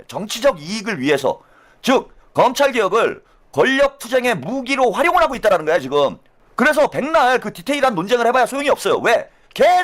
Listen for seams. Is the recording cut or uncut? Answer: uncut